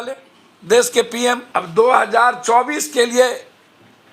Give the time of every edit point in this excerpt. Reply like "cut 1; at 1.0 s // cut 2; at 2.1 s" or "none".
cut 1; at 1.4 s